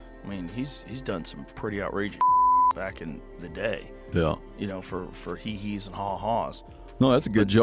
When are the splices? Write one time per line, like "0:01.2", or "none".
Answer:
none